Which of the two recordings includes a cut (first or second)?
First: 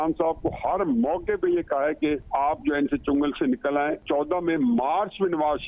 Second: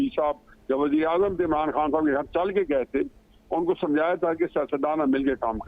first